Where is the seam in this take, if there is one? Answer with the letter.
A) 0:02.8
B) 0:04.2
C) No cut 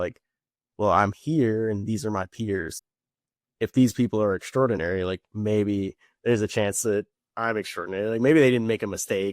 A